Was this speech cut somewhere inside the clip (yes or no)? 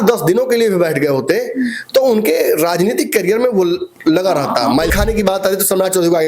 yes